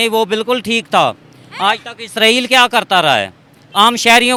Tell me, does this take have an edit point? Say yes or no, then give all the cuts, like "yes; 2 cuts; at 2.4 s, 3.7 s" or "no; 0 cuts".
no; 0 cuts